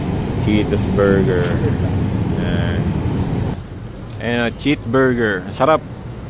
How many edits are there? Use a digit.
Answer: 1